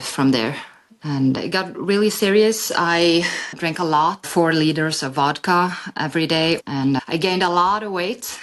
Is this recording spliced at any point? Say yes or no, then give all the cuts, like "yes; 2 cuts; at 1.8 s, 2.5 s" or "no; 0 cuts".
yes; 1 cut; at 6.6 s